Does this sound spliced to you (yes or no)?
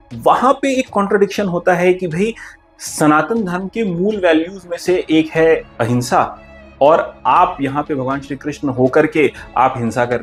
no